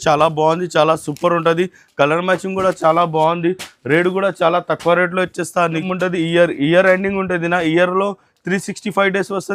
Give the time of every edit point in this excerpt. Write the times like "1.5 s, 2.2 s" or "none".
5.8 s